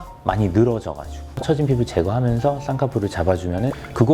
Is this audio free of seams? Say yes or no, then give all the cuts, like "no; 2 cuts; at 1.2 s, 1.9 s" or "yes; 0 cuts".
no; 1 cut; at 1.3 s